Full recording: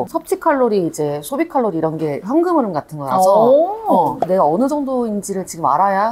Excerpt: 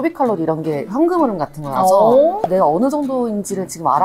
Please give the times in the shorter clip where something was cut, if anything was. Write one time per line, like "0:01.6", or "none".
0:02.4